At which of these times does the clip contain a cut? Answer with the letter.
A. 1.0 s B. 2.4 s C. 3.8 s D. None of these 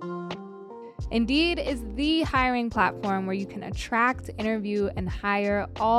A